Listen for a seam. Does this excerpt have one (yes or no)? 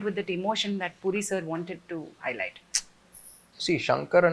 no